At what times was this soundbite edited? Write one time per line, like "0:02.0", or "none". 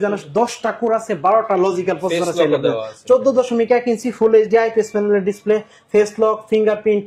none